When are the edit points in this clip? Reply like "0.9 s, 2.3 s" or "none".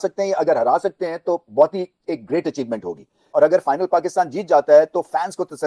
3.2 s